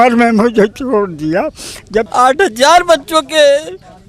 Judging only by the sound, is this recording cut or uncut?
cut